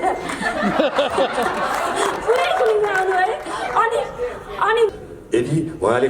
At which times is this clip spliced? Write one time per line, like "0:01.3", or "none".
0:04.9